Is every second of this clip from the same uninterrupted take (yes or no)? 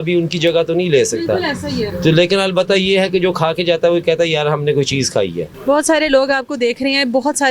yes